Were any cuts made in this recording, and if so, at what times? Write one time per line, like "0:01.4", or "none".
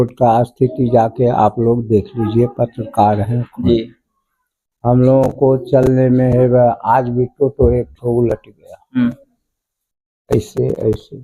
none